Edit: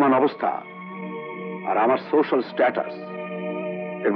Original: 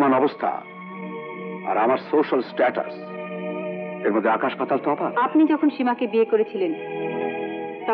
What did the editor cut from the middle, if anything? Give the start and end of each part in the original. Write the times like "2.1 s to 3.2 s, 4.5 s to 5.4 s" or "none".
none